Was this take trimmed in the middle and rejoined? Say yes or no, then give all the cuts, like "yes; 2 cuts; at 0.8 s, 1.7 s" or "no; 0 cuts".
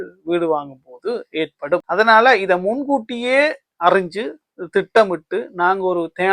yes; 1 cut; at 1.8 s